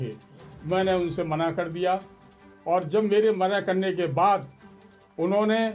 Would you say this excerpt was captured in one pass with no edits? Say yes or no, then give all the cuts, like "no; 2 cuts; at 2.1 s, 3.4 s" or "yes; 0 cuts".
yes; 0 cuts